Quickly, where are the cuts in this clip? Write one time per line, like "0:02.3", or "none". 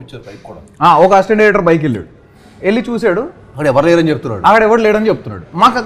none